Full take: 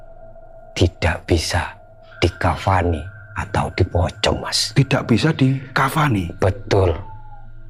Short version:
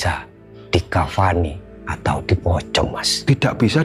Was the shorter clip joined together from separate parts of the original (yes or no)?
no